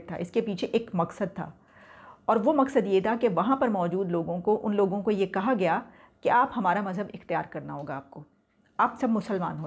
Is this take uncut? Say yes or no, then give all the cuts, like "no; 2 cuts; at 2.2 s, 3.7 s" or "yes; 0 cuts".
yes; 0 cuts